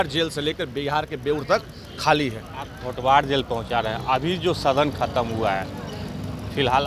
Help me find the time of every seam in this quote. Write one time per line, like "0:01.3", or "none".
none